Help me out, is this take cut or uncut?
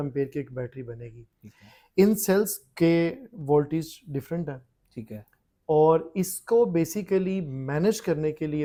uncut